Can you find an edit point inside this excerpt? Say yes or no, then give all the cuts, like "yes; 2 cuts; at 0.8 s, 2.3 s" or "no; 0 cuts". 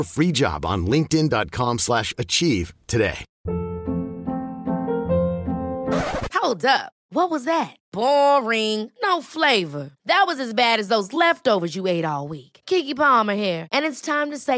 no; 0 cuts